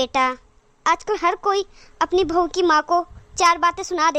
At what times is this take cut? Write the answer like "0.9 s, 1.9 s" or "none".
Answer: none